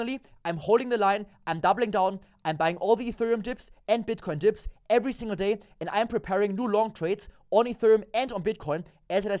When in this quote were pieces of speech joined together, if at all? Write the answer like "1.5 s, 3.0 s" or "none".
none